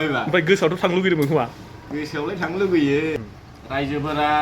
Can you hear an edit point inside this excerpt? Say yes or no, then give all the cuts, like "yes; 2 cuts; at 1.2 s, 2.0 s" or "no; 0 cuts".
yes; 1 cut; at 3.2 s